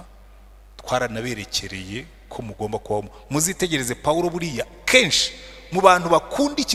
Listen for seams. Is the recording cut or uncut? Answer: uncut